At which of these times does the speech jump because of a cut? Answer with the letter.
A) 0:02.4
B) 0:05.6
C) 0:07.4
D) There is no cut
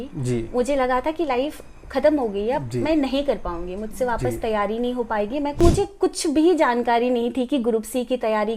B